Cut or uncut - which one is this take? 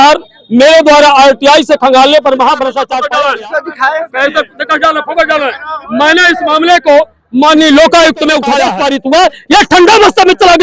cut